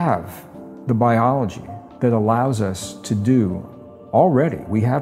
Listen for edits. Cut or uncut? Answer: uncut